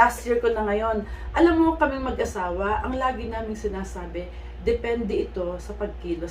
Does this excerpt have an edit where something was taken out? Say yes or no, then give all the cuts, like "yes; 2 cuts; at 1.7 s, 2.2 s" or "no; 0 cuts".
no; 0 cuts